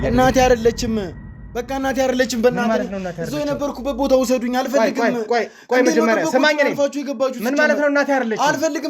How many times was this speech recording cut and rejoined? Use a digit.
0